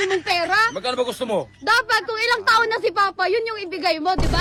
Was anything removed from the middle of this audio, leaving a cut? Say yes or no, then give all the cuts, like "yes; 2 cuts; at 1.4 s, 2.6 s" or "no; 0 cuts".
no; 0 cuts